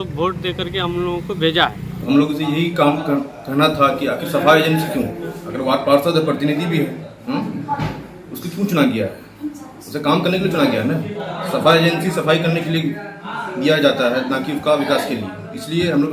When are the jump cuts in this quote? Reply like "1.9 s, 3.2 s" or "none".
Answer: 1.9 s